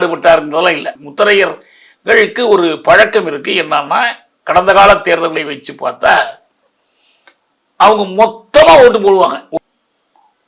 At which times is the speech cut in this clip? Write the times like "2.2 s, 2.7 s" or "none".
0.9 s, 9.5 s